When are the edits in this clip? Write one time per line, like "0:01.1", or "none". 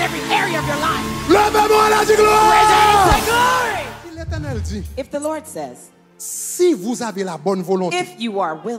0:04.2